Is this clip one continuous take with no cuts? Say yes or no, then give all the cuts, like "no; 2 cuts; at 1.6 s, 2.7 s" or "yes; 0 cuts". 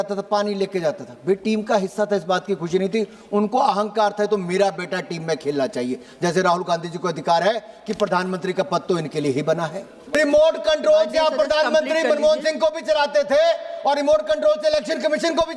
no; 1 cut; at 10.1 s